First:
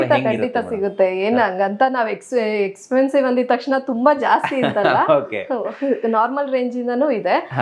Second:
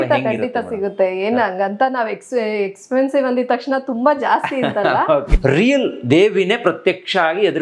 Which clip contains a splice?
second; 1 cut; at 5.3 s

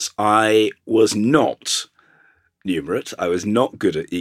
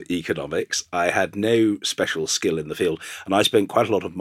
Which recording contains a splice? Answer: second; 1 cut; at 3.1 s

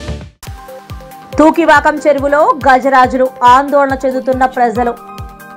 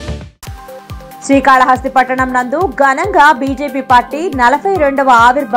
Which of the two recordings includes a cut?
second; 1 cut; at 1.0 s

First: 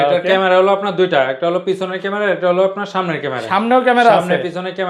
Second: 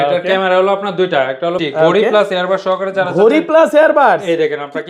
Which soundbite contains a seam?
second; 1 cut; at 1.6 s

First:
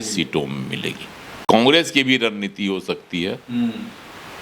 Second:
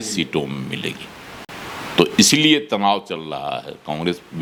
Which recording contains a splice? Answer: first; 1 cut; at 1.4 s

